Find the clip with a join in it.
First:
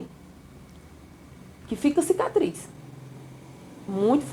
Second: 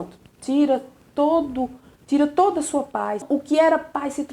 second; 1 cut; at 3.2 s

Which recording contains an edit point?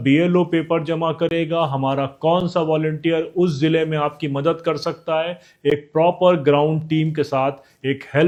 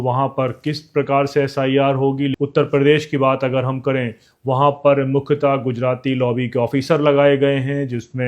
second; 1 cut; at 2.4 s

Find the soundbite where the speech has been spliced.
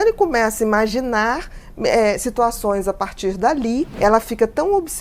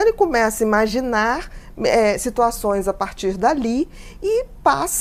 first; 1 cut; at 3.9 s

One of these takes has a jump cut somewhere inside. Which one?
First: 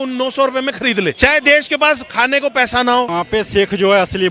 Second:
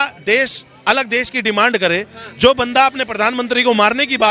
first; 2 cuts; at 1.2 s, 3.1 s

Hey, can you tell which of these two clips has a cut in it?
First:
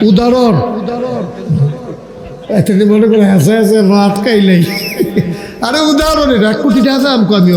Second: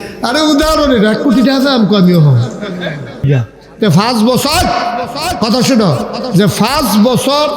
second; 1 cut; at 3.3 s

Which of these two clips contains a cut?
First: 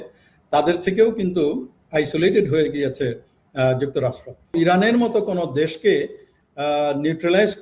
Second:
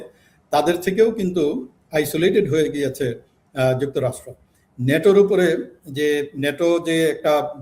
first; 1 cut; at 4.5 s

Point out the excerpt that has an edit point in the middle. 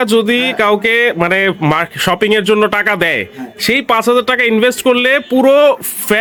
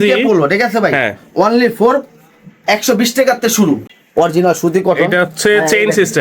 second; 1 cut; at 3.9 s

